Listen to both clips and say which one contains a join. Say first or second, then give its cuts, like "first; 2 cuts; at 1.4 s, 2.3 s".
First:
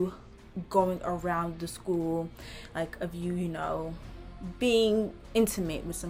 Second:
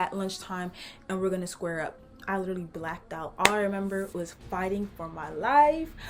second; 1 cut; at 2.1 s